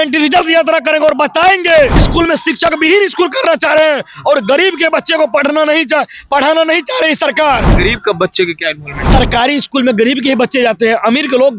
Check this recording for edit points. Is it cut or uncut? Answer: cut